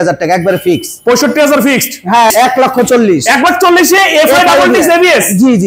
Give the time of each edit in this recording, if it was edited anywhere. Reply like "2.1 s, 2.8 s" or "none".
2.3 s